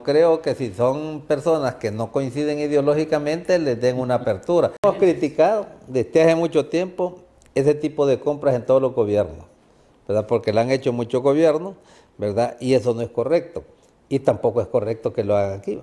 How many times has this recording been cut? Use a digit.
1